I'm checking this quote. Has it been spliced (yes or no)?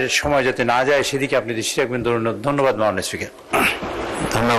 no